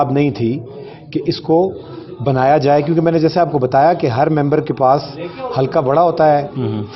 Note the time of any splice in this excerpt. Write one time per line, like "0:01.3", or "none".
none